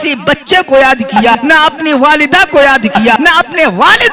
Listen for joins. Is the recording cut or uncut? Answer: cut